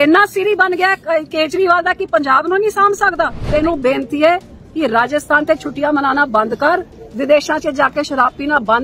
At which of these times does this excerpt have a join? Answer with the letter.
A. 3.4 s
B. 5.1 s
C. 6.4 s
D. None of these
A